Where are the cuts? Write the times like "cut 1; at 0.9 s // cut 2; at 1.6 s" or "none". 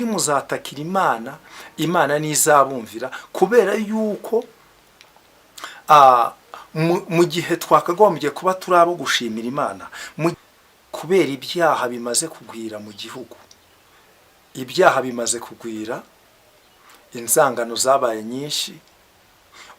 cut 1; at 10.3 s